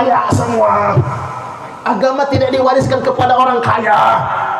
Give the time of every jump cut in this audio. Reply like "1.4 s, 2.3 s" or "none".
none